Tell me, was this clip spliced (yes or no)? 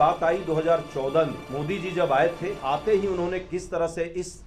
yes